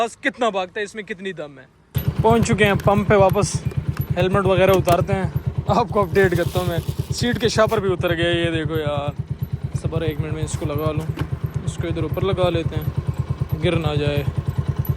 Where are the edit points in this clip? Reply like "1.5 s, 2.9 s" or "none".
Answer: 1.9 s